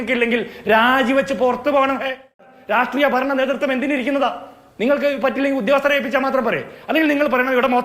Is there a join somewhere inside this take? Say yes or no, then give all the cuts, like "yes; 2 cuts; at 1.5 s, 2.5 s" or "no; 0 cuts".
yes; 1 cut; at 2.5 s